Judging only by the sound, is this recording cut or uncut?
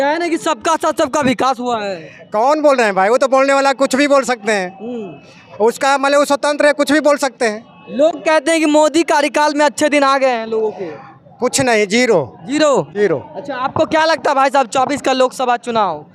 uncut